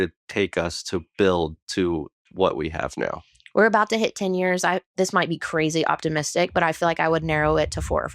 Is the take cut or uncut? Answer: cut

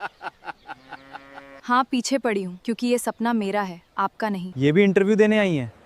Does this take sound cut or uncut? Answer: cut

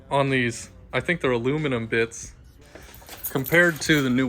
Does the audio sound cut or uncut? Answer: cut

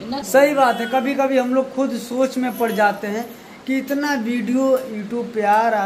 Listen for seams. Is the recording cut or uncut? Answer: uncut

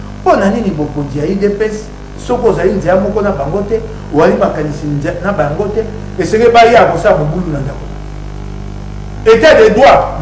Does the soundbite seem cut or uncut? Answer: uncut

